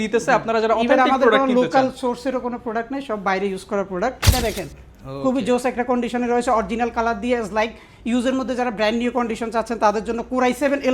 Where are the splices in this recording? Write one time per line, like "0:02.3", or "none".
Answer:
0:04.3